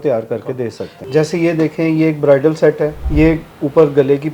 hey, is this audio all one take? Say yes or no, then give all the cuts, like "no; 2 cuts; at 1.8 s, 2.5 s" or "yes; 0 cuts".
no; 2 cuts; at 0.9 s, 3.0 s